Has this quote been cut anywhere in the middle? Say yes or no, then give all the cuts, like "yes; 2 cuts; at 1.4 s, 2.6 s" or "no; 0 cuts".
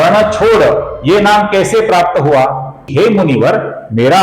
yes; 1 cut; at 2.8 s